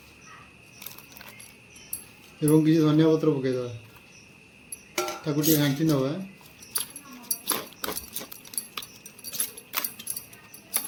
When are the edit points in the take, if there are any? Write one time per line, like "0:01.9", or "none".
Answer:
none